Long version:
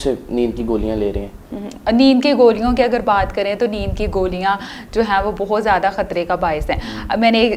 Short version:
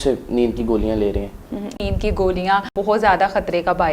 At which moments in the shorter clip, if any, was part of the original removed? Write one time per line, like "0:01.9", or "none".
0:01.8
0:02.7